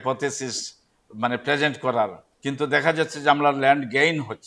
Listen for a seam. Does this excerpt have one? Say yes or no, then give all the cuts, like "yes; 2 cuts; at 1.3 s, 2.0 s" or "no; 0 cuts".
yes; 1 cut; at 2.3 s